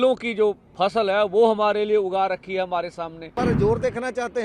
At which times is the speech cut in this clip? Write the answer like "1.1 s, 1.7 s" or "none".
3.4 s